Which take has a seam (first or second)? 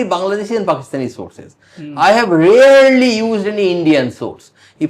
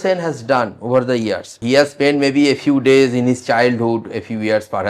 second